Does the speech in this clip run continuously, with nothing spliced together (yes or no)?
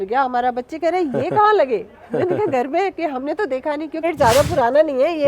no